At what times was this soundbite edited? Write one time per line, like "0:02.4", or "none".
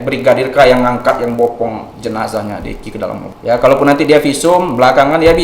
0:03.3

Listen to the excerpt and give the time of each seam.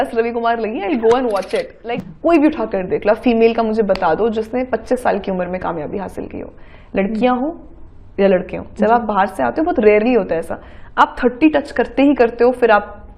0:01.8

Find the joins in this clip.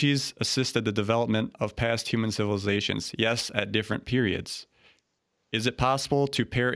none

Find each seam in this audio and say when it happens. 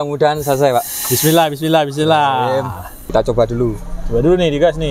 0:02.9

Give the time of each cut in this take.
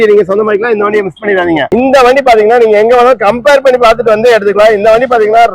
0:01.7

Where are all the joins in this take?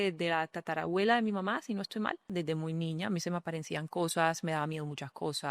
0:02.3

